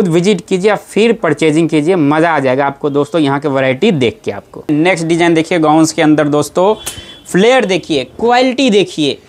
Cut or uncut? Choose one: cut